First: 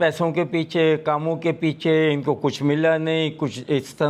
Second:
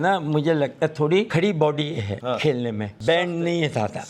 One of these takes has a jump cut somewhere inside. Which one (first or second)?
second